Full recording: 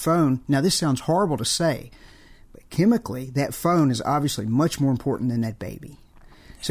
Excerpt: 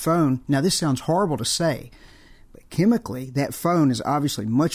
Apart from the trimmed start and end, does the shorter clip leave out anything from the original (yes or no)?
no